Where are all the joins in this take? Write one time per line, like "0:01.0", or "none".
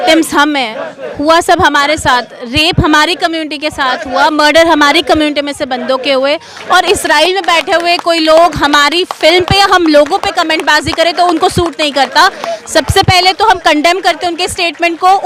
none

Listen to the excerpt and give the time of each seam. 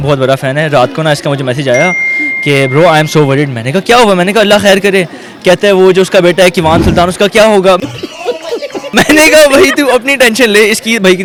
none

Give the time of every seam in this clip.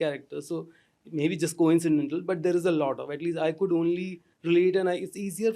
none

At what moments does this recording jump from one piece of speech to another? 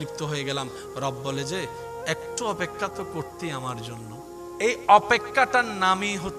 0:04.4

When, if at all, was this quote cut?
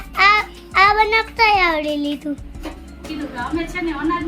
0:03.0

